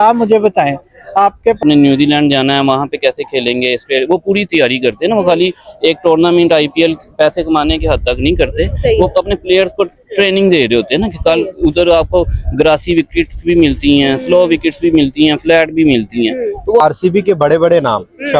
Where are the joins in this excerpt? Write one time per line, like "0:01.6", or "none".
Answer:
0:01.6
0:16.8